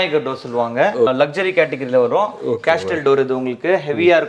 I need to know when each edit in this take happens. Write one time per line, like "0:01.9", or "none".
0:01.1